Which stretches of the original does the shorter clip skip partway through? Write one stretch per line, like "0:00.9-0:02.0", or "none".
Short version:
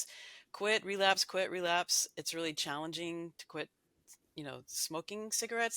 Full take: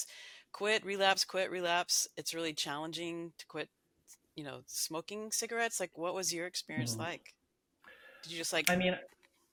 none